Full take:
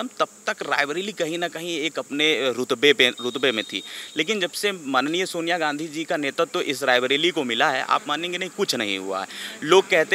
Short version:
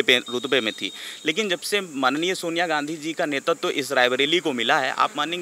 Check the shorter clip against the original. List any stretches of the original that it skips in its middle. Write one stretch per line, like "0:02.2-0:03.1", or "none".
none